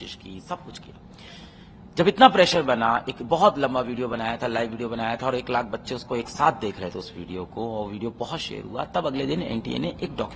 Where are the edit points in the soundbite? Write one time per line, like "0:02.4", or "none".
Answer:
none